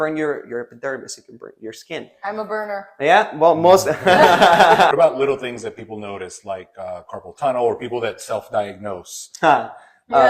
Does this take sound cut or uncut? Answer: cut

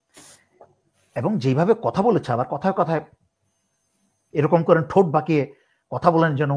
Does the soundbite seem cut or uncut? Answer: uncut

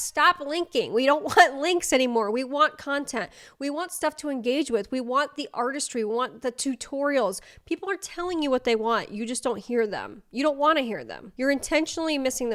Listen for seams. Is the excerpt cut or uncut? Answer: uncut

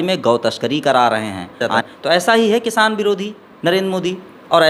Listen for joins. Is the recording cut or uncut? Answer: cut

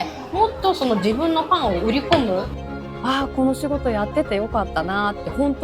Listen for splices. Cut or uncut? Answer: cut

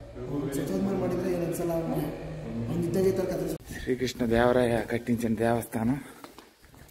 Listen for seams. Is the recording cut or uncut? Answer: cut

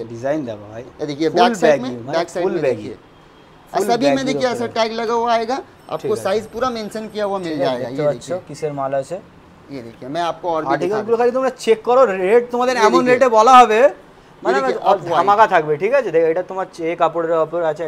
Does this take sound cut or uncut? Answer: uncut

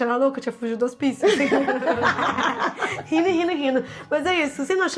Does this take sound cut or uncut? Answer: uncut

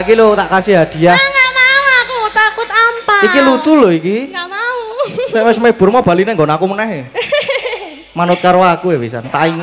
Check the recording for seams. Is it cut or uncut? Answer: uncut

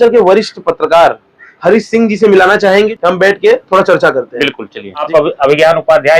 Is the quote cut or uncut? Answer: cut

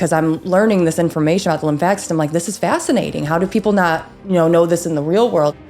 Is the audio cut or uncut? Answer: uncut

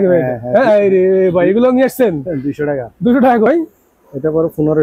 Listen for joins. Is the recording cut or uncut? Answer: cut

